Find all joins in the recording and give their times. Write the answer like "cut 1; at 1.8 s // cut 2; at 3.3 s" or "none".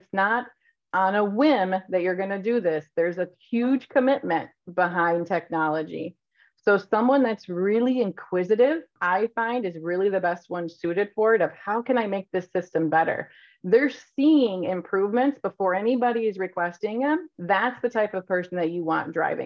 cut 1; at 8.9 s // cut 2; at 17.3 s